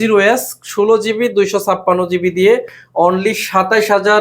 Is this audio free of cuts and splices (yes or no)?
yes